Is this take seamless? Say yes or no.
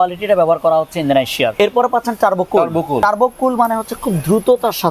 no